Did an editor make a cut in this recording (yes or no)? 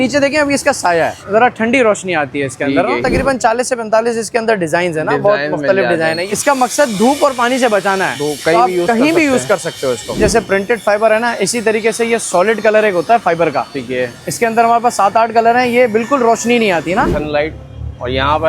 yes